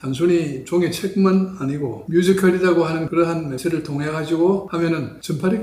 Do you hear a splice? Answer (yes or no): yes